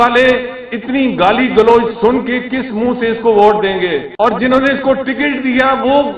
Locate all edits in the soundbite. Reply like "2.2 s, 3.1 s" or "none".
4.3 s